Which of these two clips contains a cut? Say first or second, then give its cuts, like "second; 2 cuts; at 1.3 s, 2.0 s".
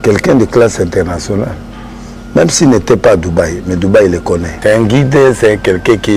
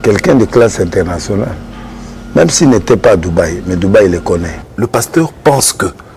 second; 1 cut; at 4.5 s